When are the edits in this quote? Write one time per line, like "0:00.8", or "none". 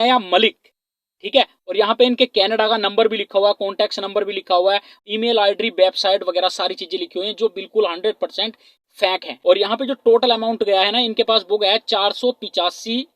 0:09.3